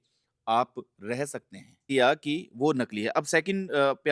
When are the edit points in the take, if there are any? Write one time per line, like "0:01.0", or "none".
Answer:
0:01.9

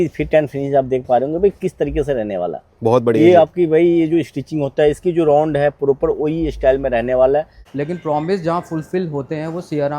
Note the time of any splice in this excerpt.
0:07.6

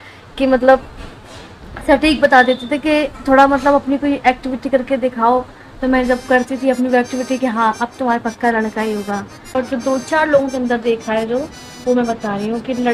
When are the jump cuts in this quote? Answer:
0:09.5

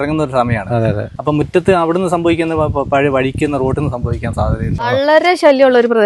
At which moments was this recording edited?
0:01.1
0:04.9

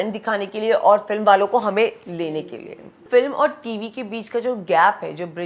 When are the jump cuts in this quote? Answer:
0:03.0

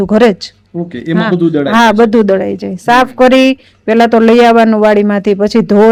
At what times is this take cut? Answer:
none

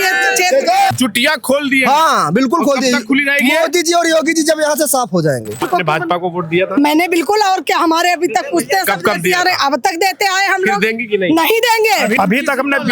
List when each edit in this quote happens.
0:00.9
0:05.6
0:12.1

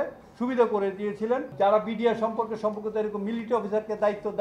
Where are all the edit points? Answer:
0:01.5

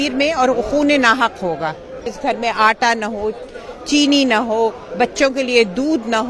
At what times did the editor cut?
0:02.0

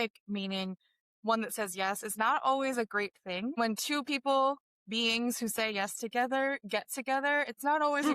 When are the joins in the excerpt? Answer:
0:03.6

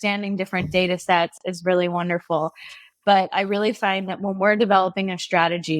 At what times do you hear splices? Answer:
none

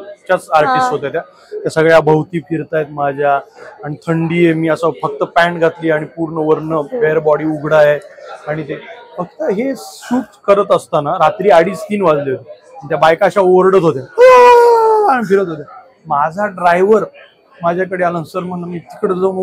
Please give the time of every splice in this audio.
none

